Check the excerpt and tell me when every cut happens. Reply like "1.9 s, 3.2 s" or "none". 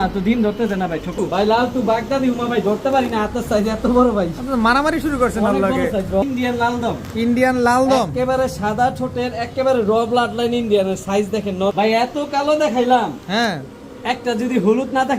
1.2 s, 6.2 s, 11.7 s